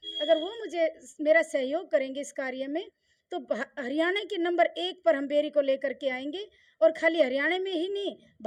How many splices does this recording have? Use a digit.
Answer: 0